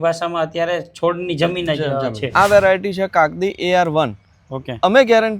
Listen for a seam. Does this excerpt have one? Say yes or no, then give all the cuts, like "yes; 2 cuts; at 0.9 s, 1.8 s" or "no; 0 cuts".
yes; 1 cut; at 2.2 s